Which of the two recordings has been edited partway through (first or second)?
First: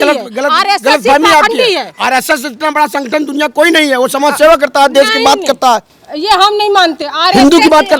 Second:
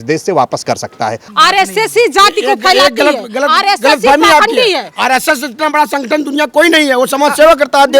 second